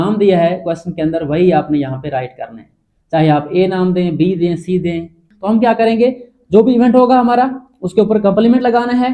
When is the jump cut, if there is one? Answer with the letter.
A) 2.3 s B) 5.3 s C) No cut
B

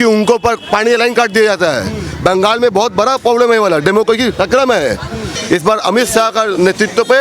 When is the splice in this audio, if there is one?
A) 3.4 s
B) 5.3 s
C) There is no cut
B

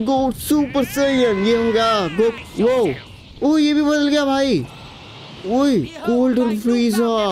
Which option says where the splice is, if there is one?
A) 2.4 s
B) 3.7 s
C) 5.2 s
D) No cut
A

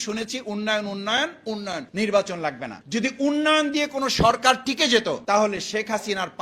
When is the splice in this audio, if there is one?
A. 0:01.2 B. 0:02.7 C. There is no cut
B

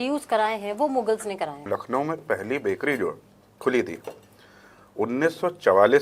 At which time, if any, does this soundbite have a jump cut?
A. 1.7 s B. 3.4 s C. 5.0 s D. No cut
A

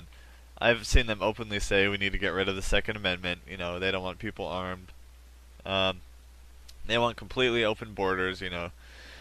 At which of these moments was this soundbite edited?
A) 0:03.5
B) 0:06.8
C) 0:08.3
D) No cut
B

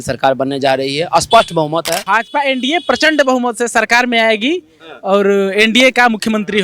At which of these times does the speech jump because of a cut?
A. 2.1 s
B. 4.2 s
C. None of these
A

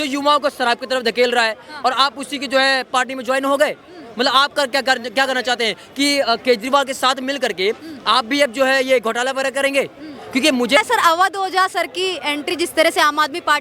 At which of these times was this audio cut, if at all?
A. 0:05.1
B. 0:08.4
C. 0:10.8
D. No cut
C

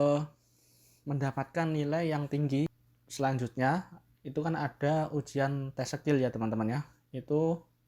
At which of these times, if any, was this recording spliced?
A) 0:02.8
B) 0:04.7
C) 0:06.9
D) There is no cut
A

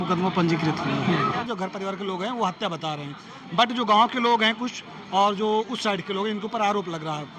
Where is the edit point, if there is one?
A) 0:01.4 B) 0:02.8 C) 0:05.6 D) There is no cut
A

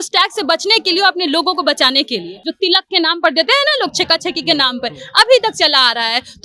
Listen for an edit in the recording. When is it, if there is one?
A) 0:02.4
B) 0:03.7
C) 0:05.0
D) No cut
A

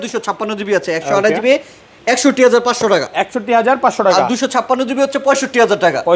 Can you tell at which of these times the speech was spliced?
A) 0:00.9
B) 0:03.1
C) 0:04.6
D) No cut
D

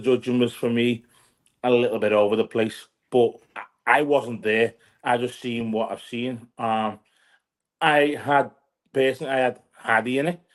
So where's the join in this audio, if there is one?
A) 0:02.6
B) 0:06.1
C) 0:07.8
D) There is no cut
D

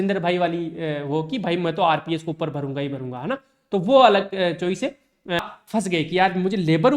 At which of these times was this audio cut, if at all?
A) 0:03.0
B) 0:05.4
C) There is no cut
B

